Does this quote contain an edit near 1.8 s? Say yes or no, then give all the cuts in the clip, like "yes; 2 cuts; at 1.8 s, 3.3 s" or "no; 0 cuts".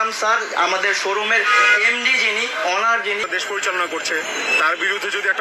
no; 1 cut; at 3.3 s